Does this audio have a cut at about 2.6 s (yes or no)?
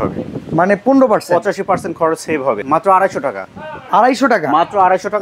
yes